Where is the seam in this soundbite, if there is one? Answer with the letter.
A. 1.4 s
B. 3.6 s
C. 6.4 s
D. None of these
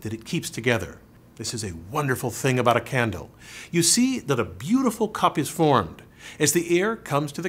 A